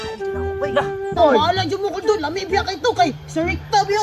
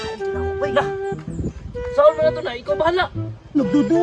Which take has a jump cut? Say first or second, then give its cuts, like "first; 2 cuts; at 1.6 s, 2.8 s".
first; 1 cut; at 1.1 s